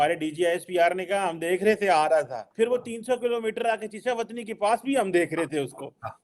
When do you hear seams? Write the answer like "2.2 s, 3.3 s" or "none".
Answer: 2.4 s